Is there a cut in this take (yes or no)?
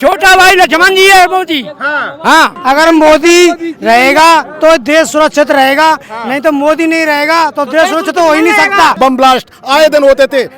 yes